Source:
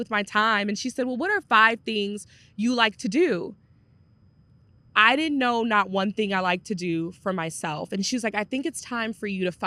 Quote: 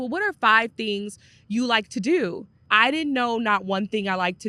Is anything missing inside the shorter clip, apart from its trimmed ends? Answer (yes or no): yes